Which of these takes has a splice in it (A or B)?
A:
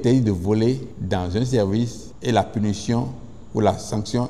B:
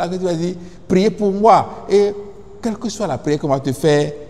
A